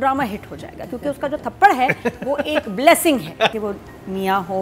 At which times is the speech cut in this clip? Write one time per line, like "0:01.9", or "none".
0:03.6